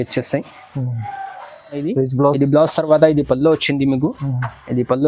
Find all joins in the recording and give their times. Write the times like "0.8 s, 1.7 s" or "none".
1.8 s